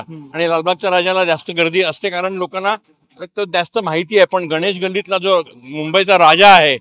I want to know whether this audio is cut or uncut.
uncut